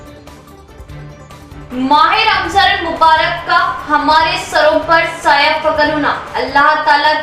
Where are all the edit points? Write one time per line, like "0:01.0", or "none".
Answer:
0:01.0